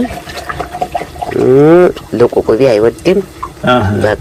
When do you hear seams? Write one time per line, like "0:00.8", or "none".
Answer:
none